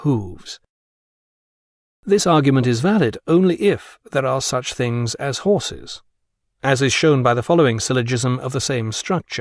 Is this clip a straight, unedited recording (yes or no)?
yes